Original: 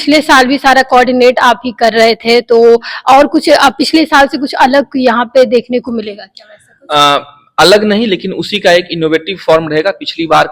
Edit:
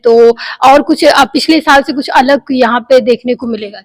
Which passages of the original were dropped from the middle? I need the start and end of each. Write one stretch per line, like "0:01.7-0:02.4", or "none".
none